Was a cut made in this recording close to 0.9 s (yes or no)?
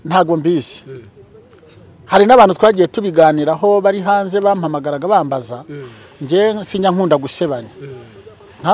no